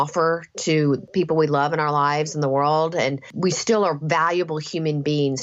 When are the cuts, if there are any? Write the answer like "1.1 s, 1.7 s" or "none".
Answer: 1.1 s, 3.3 s

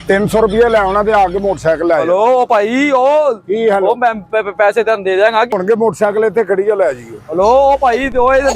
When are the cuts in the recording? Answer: 5.5 s

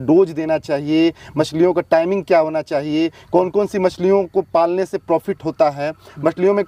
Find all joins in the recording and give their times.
none

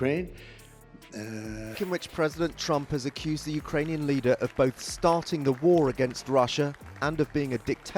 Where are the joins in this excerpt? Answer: 1.6 s

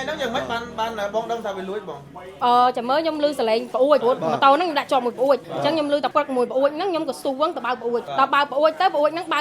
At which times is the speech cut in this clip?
3.8 s, 5.8 s, 8.1 s

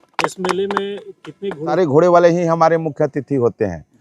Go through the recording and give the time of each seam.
1.7 s

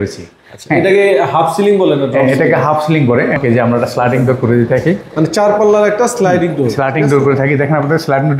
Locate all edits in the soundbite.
3.4 s

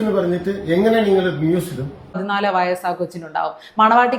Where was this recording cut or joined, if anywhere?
2.2 s

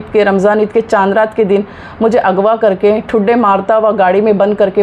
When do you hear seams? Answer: none

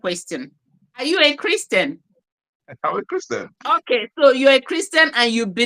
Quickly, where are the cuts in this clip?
1.0 s, 3.8 s

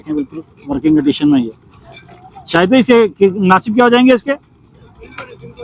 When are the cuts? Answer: none

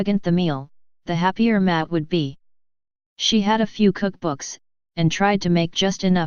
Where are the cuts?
1.6 s

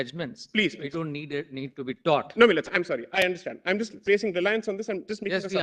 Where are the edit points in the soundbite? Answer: none

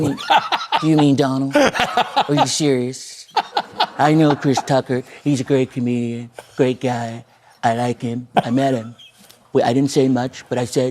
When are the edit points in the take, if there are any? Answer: 3.6 s, 8.2 s

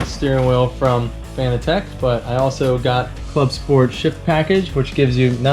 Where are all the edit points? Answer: 3.2 s

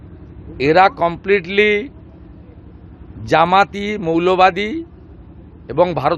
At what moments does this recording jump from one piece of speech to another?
none

